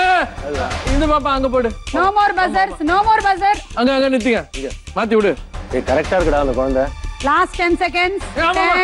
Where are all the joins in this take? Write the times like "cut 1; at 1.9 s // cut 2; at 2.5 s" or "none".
cut 1; at 3.7 s // cut 2; at 5.5 s